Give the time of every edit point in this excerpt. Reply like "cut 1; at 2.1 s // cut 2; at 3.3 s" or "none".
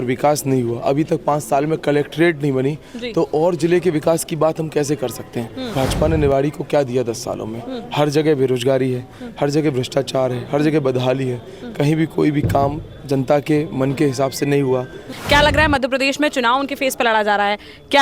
cut 1; at 5.7 s // cut 2; at 15.1 s